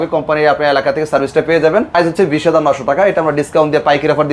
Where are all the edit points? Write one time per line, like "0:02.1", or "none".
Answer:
0:01.9